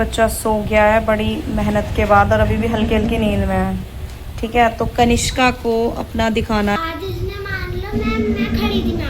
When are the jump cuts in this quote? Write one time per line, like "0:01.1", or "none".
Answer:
0:06.8